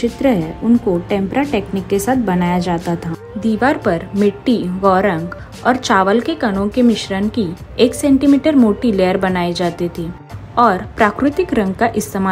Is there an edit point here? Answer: no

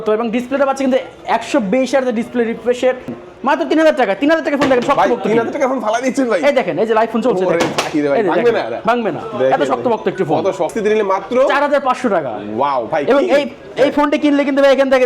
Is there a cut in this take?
yes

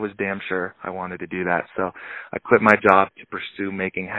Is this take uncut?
yes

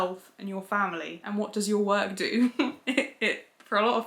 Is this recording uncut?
yes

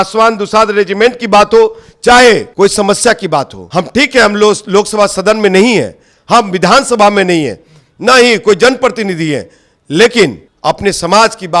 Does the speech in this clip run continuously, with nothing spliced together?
no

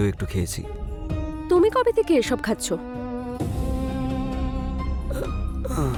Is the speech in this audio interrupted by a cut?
no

